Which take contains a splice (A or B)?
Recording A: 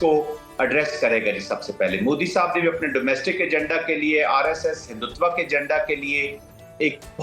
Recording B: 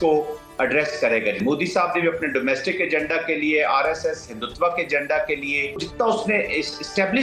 B